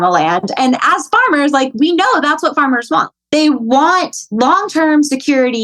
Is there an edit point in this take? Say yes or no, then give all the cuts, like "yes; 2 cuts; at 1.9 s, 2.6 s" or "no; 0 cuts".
yes; 2 cuts; at 3.1 s, 4.2 s